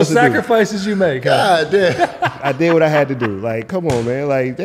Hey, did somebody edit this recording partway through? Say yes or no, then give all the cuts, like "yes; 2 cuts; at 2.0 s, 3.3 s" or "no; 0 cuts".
no; 0 cuts